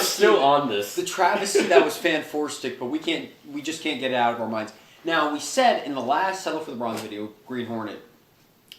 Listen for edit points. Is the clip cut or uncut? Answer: cut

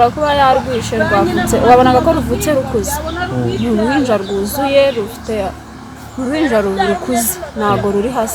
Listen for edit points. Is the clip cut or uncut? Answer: uncut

